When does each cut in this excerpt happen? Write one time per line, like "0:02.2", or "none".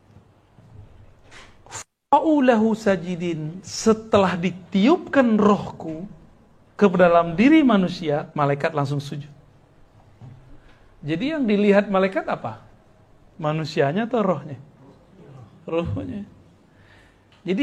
0:08.3